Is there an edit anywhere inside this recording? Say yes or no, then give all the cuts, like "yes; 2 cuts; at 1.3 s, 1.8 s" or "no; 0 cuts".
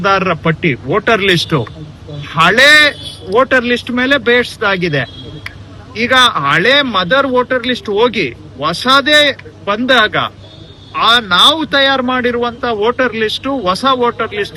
no; 0 cuts